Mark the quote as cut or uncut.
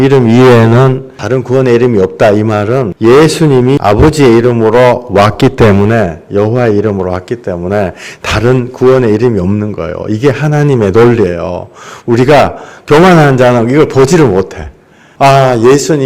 cut